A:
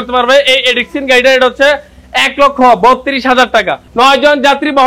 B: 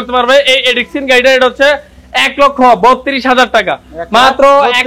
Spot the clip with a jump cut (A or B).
A